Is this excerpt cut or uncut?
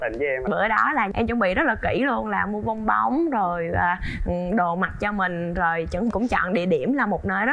cut